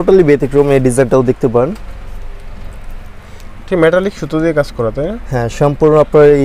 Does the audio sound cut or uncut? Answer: uncut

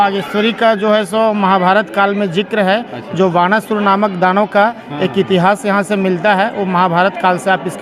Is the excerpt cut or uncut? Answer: uncut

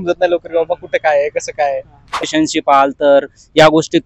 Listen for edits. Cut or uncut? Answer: cut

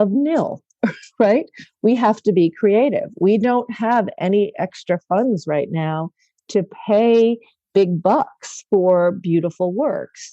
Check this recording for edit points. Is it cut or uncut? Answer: cut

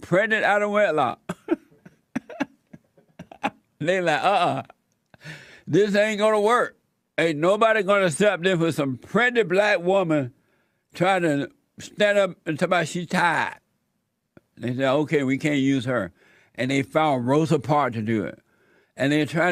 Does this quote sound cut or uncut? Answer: uncut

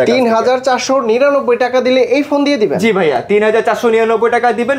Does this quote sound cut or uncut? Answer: uncut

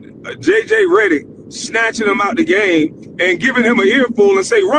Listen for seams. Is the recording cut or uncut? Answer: uncut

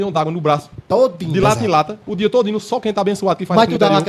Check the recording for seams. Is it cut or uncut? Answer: uncut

